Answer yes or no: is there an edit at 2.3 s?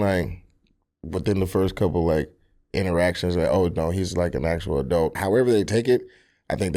no